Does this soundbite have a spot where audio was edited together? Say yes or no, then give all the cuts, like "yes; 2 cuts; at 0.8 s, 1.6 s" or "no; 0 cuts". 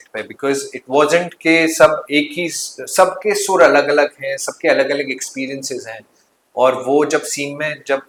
no; 0 cuts